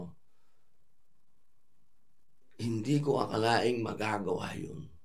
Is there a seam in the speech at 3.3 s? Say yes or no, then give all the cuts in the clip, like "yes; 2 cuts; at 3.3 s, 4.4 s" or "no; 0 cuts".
yes; 1 cut; at 3.3 s